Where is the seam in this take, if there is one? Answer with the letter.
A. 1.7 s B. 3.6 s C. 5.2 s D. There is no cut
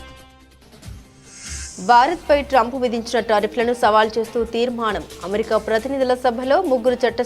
A